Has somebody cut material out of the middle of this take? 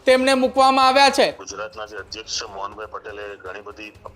yes; 1 cut; at 1.5 s

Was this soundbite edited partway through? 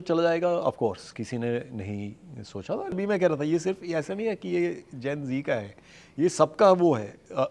yes; 1 cut; at 3.0 s

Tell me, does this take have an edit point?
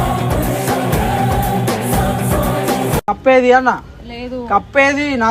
no; 0 cuts

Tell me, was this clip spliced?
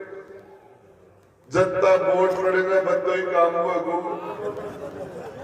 yes; 1 cut; at 4.4 s

